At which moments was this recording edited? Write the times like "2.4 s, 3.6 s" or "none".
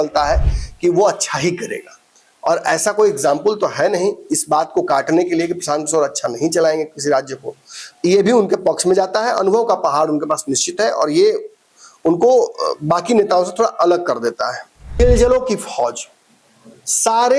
15.0 s